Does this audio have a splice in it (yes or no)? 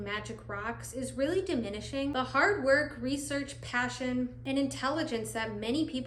no